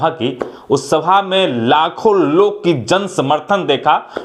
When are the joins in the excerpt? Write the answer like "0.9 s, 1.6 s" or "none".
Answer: none